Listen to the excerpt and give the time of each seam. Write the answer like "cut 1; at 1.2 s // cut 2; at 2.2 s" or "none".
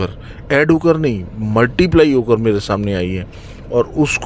none